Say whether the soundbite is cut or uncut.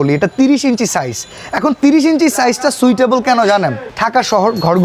uncut